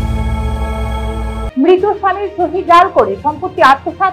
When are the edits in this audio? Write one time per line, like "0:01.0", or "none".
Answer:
0:01.5